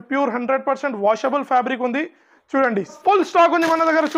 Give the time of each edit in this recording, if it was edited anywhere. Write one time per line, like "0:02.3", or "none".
0:03.0